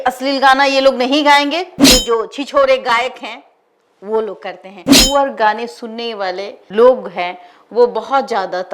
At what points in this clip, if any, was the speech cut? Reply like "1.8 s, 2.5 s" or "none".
1.7 s, 4.9 s